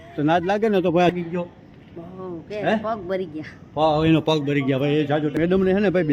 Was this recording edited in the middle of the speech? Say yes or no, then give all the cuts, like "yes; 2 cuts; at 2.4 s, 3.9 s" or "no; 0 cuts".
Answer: yes; 2 cuts; at 1.1 s, 5.4 s